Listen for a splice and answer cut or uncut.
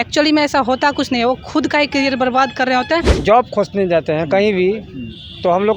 cut